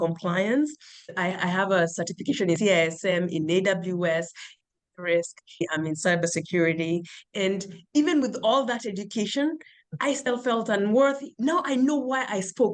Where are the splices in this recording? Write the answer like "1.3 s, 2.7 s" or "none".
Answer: 1.1 s, 5.6 s, 11.3 s

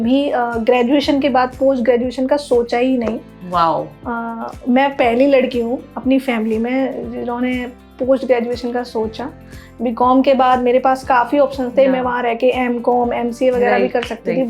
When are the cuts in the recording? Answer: none

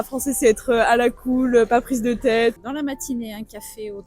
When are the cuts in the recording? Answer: 2.6 s

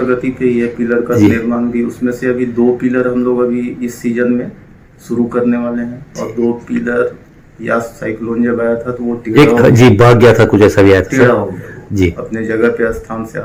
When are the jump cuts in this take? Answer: none

